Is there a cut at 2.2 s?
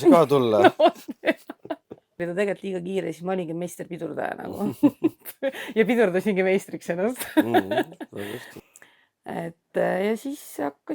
yes; 2 cuts; at 2.2 s, 8.5 s

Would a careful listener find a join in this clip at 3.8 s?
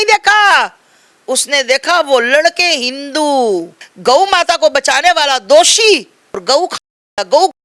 yes; 2 cuts; at 3.8 s, 6.4 s

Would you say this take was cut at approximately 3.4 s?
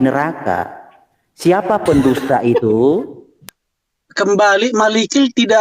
yes; 1 cut; at 3.4 s

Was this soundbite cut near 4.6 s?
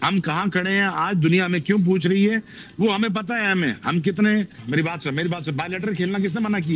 yes; 1 cut; at 4.6 s

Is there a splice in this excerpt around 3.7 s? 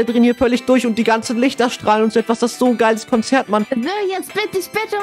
yes; 1 cut; at 3.7 s

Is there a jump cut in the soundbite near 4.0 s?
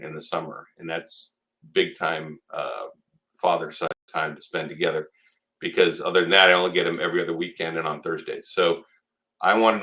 yes; 1 cut; at 4.0 s

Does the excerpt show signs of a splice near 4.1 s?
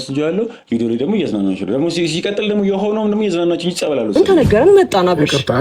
yes; 1 cut; at 4.1 s

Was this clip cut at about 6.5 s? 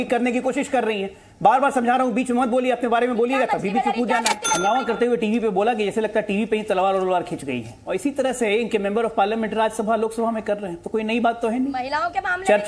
no; 1 cut; at 4.2 s

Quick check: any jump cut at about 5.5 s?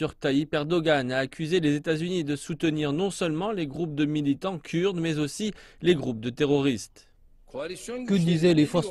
no; 1 cut; at 2.3 s

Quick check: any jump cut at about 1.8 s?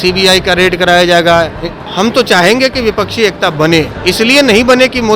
yes; 2 cuts; at 1.8 s, 3.9 s

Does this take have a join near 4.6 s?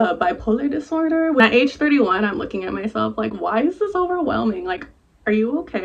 no; 1 cut; at 1.4 s

